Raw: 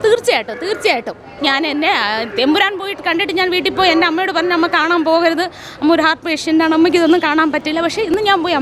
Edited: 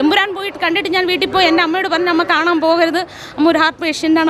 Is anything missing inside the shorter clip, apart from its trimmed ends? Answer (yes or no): no